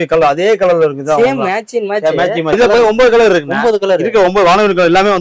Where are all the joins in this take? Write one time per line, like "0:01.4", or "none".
0:02.5